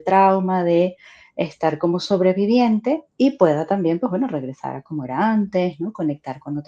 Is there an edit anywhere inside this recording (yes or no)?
no